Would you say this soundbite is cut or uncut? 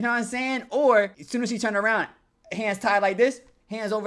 cut